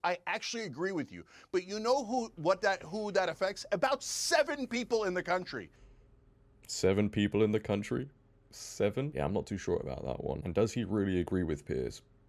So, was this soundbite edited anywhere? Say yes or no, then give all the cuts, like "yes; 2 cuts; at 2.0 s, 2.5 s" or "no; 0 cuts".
no; 0 cuts